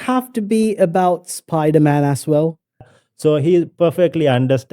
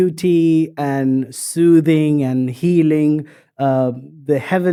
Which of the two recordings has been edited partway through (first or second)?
first